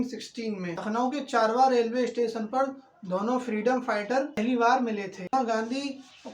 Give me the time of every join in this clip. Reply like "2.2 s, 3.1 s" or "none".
0.7 s, 5.3 s